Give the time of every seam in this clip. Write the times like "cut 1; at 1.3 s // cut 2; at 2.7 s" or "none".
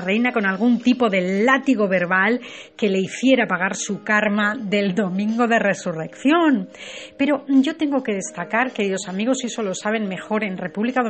cut 1; at 6.1 s